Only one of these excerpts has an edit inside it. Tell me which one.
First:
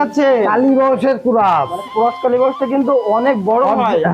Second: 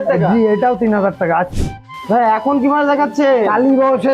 second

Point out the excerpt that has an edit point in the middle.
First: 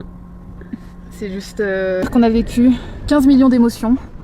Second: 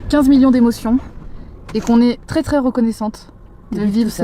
first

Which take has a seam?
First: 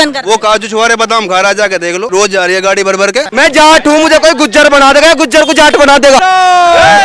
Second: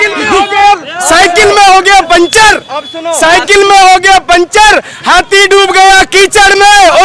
first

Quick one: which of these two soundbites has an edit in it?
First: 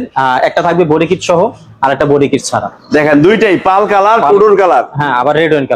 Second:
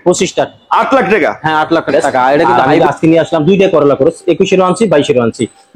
second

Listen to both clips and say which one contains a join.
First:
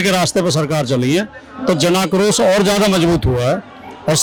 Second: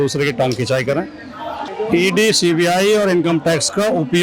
second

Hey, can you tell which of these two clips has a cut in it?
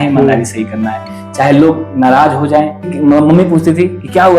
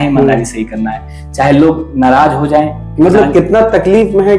first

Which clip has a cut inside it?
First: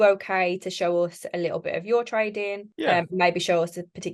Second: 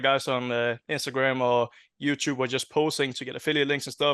first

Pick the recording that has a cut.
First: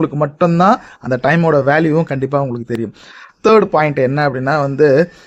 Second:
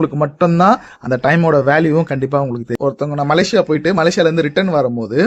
second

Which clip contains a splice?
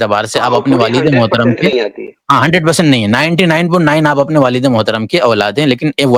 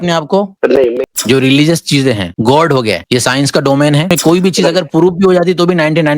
second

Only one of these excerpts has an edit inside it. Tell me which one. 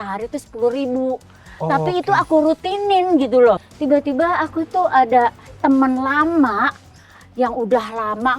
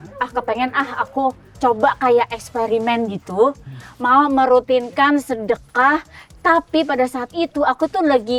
first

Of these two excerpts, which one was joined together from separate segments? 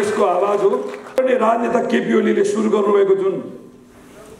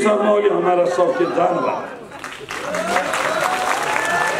first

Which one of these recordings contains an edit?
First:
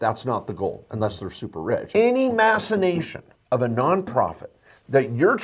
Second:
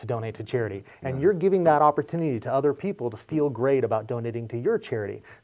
first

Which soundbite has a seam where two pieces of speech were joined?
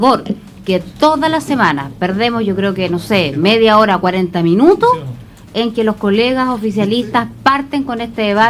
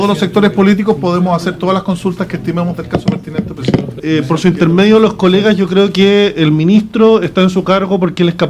second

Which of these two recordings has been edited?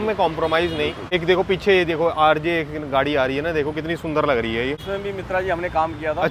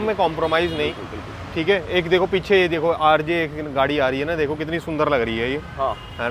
first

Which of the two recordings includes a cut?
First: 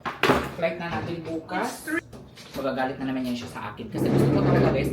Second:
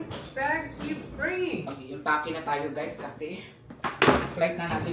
first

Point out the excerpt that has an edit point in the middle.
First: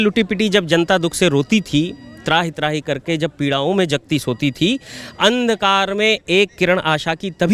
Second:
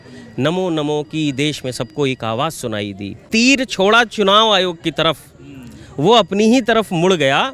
second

